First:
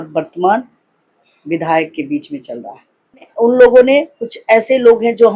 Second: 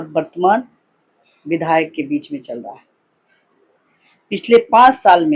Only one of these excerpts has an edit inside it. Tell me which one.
first; 1 cut; at 3.3 s

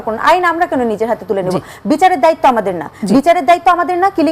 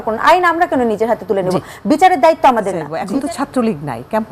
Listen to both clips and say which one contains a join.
second; 1 cut; at 2.9 s

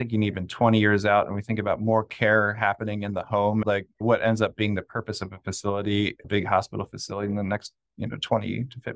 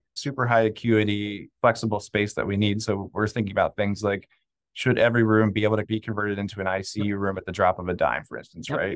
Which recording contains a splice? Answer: first; 1 cut; at 3.6 s

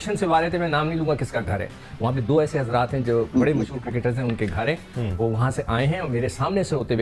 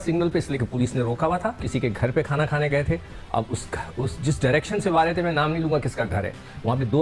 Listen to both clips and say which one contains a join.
second; 1 cut; at 1.6 s

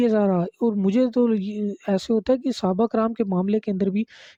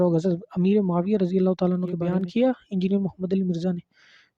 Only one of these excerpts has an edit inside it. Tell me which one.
second; 1 cut; at 2.0 s

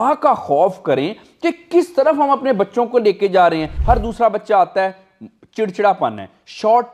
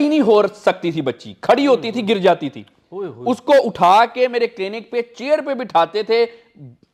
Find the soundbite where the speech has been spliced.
first; 1 cut; at 3.7 s

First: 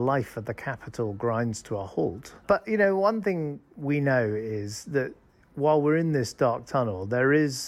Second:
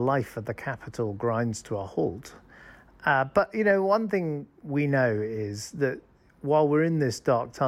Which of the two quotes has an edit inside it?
first; 1 cut; at 2.4 s

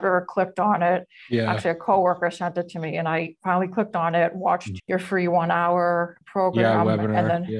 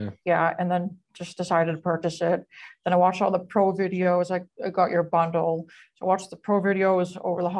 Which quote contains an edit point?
first; 2 cuts; at 4.7 s, 6.2 s

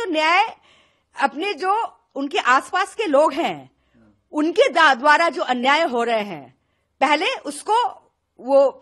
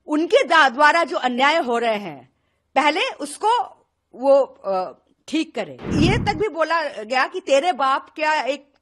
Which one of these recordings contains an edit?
second; 1 cut; at 5.8 s

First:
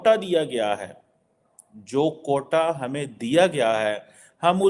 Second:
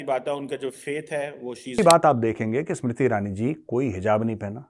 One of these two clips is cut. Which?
second; 1 cut; at 1.8 s

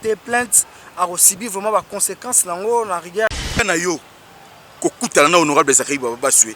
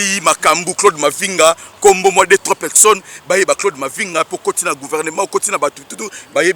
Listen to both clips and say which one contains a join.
first; 1 cut; at 3.6 s

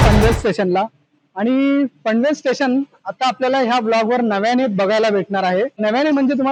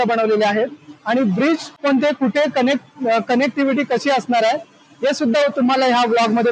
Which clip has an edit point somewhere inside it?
second; 1 cut; at 1.9 s

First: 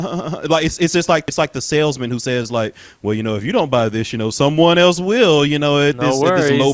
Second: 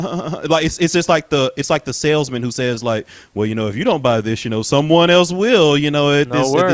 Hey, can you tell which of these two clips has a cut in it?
first; 1 cut; at 1.2 s

